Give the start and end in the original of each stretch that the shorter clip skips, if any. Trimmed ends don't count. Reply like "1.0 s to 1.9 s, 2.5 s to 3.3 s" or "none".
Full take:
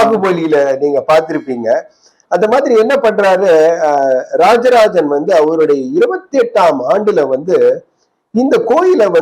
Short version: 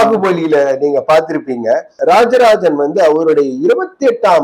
1.9 s to 4.3 s